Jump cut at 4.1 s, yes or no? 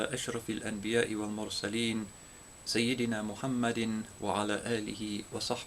yes